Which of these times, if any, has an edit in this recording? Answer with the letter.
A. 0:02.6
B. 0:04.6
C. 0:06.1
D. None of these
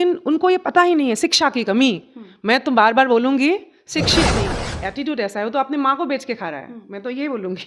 B